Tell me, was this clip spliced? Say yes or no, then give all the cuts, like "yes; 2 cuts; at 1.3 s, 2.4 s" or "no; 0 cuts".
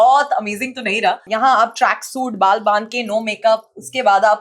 yes; 1 cut; at 1.3 s